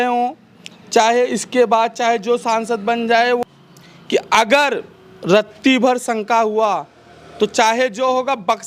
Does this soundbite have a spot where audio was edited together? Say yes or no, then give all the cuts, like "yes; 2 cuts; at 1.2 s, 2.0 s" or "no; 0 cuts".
yes; 1 cut; at 3.4 s